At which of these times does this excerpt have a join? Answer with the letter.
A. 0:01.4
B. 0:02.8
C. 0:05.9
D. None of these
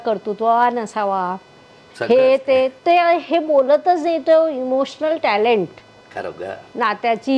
D